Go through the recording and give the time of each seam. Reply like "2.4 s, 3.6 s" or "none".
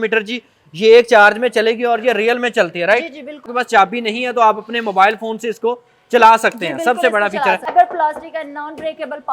3.5 s, 7.7 s